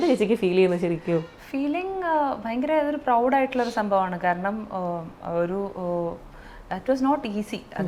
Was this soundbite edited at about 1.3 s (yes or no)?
no